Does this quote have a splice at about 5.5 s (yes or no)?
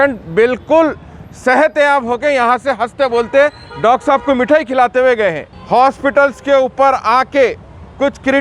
yes